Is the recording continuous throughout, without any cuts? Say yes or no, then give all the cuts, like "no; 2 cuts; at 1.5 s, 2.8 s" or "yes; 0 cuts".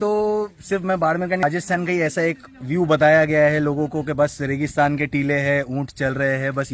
no; 1 cut; at 1.4 s